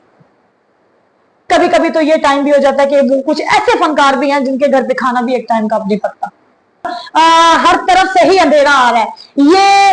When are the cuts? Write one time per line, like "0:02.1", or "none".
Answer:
0:07.0